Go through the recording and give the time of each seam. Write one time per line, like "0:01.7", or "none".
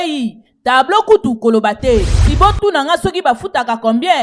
0:02.2